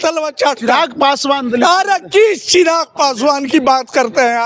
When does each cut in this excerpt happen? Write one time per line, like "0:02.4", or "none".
none